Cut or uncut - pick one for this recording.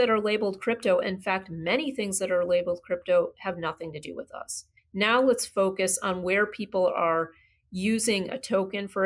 cut